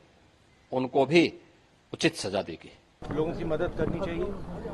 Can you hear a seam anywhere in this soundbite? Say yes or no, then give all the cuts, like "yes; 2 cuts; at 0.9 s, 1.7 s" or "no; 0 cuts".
yes; 1 cut; at 3.0 s